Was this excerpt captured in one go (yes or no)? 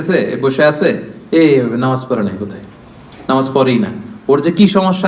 yes